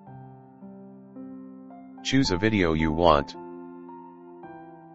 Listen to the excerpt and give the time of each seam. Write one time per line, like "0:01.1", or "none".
0:01.6
0:03.3